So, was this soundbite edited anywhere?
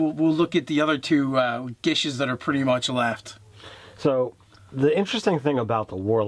yes; 1 cut; at 2.9 s

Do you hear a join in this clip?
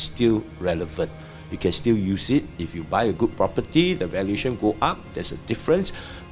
no; 0 cuts

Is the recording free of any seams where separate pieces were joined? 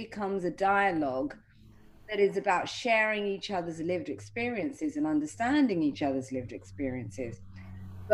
yes; 0 cuts

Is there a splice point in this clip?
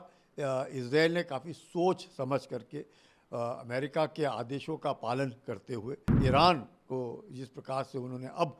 yes; 1 cut; at 6.1 s

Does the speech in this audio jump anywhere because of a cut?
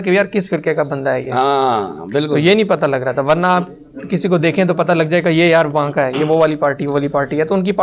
no; 0 cuts

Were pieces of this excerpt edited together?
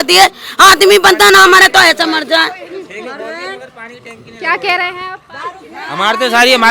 no; 0 cuts

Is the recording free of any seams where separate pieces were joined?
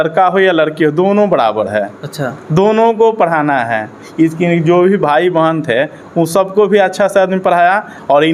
yes; 0 cuts

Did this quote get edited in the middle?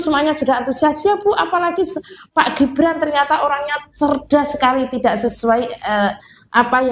no; 0 cuts

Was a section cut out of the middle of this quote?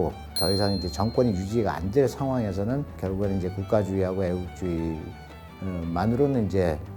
no; 0 cuts

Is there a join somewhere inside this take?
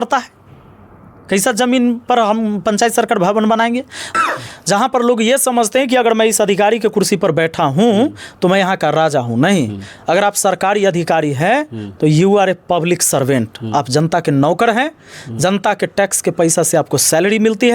yes; 1 cut; at 4.1 s

